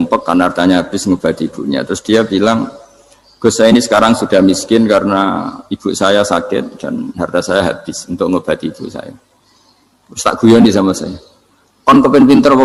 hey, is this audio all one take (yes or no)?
yes